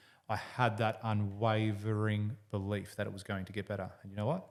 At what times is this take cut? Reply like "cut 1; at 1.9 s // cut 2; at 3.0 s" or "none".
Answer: none